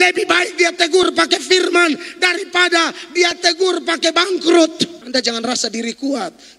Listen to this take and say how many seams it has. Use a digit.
1